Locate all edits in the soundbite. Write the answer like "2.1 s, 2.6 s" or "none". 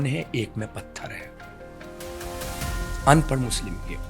none